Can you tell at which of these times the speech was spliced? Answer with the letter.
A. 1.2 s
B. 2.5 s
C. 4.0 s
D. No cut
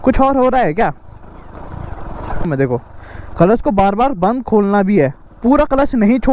B